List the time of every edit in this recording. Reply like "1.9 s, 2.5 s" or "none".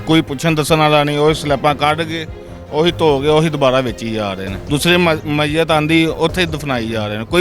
4.5 s